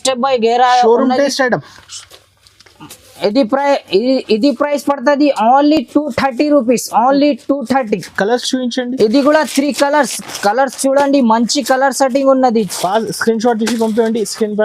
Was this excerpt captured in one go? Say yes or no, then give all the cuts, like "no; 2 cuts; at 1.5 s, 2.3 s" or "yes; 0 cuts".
yes; 0 cuts